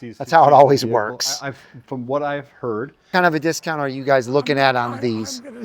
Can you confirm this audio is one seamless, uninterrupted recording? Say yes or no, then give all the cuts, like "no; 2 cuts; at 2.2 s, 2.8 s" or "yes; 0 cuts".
no; 1 cut; at 3.1 s